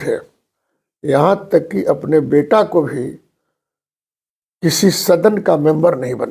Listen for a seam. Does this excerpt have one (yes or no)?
no